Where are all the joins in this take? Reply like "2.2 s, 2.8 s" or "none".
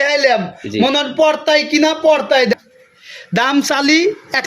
2.5 s